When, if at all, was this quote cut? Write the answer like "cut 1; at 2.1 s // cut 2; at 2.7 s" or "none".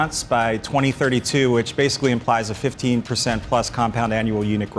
none